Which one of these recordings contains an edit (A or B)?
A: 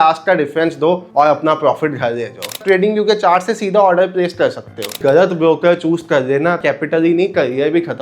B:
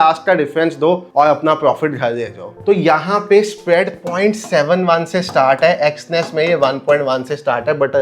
A